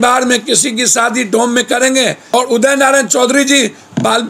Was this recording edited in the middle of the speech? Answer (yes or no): yes